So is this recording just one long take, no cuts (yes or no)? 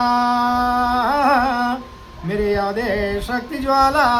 yes